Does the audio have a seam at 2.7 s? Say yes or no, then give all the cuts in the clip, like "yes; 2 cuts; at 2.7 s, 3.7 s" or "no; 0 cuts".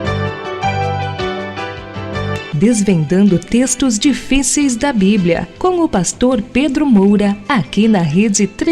no; 1 cut; at 7.4 s